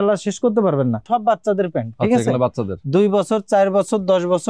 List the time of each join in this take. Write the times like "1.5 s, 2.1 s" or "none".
1.0 s